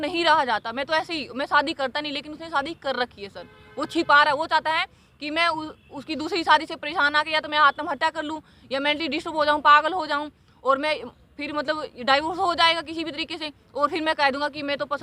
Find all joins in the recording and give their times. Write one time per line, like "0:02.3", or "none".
none

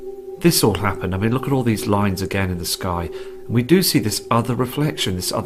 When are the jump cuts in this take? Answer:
0:02.1

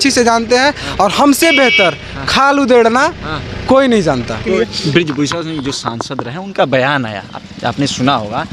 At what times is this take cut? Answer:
0:04.4

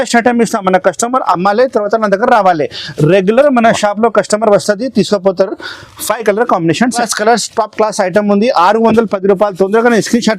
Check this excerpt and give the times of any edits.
0:07.0

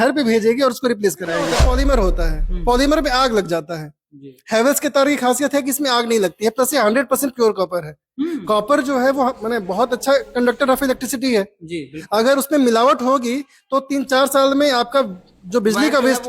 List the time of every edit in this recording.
0:01.5

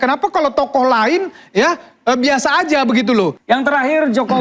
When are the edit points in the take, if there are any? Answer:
0:03.4

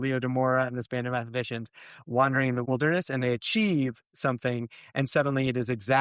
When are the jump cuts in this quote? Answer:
0:02.6

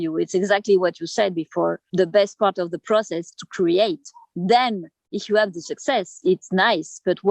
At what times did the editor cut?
0:01.8
0:06.2

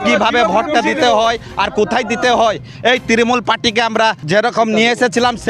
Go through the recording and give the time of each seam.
0:04.2

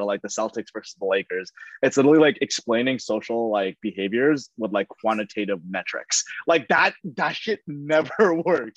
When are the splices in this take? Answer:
none

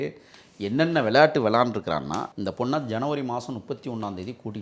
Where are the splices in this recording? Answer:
0:02.3

